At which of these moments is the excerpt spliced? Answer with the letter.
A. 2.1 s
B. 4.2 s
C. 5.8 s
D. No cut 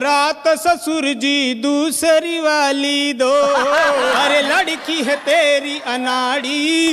B